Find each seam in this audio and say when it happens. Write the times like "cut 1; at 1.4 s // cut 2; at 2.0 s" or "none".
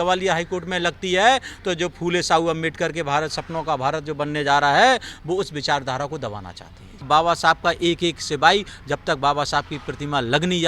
cut 1; at 7.1 s

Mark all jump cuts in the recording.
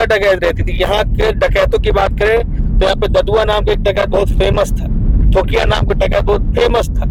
none

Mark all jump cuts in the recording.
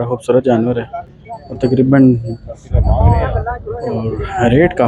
none

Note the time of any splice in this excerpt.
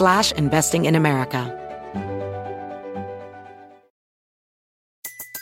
cut 1; at 1.5 s

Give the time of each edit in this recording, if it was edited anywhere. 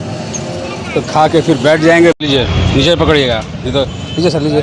cut 1; at 2.2 s

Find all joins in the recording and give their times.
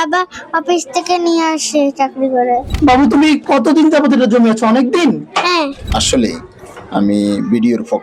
cut 1; at 2.7 s // cut 2; at 5.9 s

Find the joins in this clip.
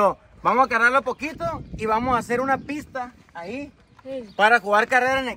none

